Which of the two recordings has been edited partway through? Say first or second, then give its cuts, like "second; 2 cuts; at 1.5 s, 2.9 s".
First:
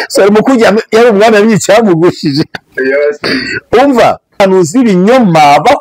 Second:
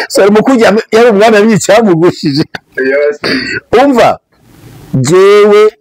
first; 1 cut; at 4.4 s